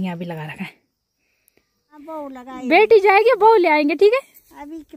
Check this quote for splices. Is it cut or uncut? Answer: cut